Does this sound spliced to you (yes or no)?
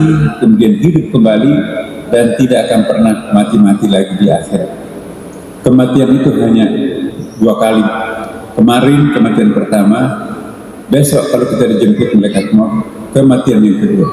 no